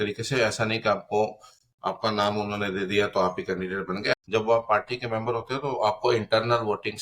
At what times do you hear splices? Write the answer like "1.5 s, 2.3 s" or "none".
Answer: 4.2 s